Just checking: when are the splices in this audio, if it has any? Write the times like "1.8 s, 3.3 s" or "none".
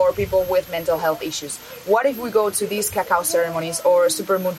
none